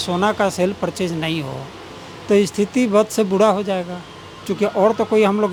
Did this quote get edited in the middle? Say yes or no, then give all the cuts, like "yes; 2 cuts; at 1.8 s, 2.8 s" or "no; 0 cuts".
no; 0 cuts